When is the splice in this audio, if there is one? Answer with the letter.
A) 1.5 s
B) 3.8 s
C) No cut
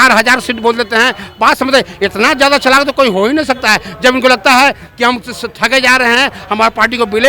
C